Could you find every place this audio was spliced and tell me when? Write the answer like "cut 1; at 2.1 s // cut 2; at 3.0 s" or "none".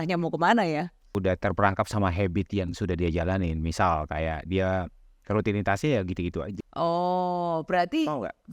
cut 1; at 1.1 s // cut 2; at 6.5 s